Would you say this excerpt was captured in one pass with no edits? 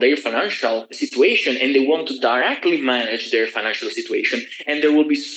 no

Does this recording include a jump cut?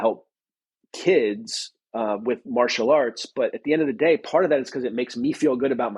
no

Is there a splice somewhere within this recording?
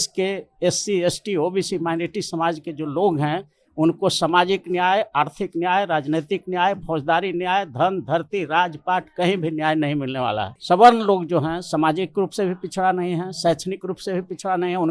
yes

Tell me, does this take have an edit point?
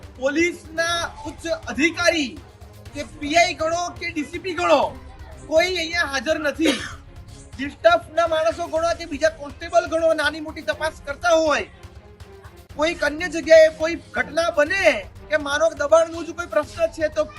no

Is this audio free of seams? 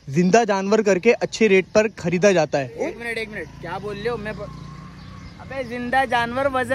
yes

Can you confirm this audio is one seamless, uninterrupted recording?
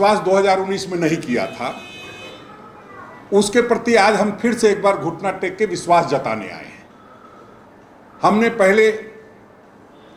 yes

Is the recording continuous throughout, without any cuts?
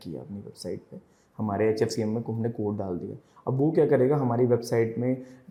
yes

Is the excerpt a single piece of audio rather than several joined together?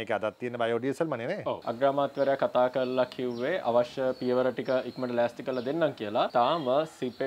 no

